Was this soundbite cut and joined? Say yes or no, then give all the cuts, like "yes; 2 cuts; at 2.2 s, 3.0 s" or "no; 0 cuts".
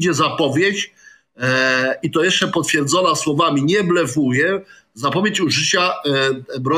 no; 0 cuts